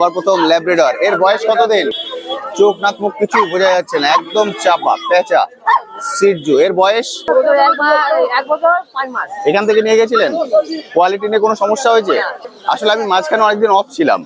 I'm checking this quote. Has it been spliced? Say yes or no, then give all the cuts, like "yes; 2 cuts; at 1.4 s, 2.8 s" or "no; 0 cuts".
yes; 3 cuts; at 1.9 s, 7.3 s, 12.4 s